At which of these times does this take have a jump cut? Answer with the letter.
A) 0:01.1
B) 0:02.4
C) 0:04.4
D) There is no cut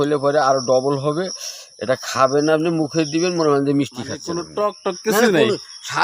C